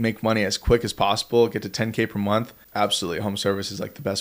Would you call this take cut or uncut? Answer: cut